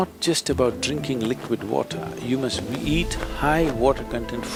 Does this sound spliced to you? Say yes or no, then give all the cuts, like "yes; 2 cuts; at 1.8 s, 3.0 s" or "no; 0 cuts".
no; 0 cuts